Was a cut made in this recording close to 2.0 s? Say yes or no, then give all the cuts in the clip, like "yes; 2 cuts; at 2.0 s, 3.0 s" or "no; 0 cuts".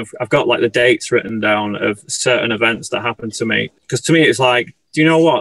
no; 1 cut; at 3.8 s